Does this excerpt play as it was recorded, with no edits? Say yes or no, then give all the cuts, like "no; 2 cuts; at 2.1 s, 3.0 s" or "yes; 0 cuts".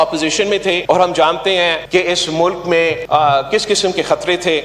no; 3 cuts; at 0.8 s, 1.8 s, 3.0 s